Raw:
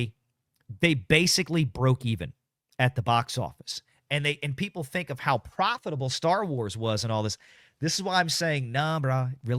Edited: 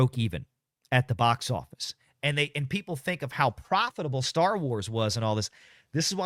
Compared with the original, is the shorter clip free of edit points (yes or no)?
yes